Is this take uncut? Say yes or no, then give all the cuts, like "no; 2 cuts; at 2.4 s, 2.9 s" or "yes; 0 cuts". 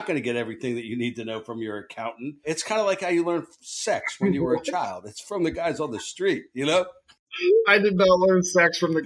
yes; 0 cuts